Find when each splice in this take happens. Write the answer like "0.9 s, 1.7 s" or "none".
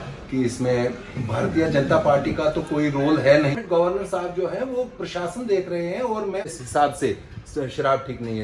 3.5 s, 6.5 s